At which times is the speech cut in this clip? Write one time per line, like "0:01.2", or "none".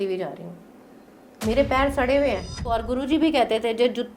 0:02.8